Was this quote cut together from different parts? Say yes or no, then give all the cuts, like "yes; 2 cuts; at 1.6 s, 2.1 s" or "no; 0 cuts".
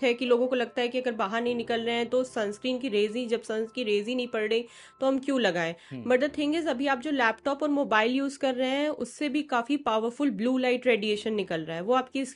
no; 0 cuts